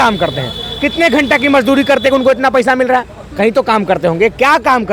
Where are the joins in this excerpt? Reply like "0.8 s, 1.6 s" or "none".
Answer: none